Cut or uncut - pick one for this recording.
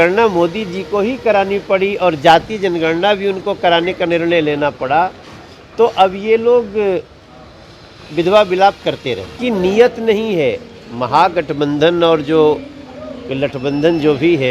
cut